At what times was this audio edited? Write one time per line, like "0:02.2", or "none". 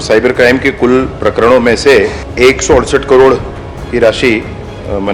0:02.2